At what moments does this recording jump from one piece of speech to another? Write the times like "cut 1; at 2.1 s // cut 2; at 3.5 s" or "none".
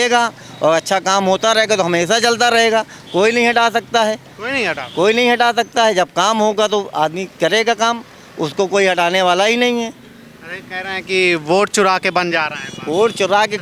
none